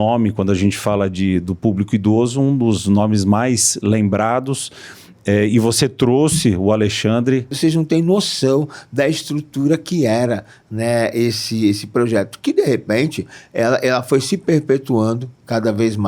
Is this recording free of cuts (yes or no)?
no